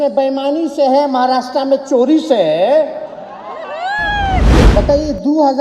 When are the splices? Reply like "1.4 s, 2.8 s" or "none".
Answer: 4.6 s